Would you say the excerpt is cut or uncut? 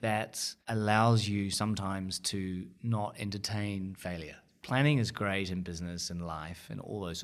cut